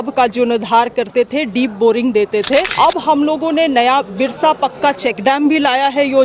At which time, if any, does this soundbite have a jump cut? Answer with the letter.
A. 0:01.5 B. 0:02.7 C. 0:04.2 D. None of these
B